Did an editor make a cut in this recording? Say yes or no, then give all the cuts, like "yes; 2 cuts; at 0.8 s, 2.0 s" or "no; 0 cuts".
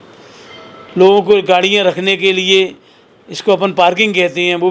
no; 0 cuts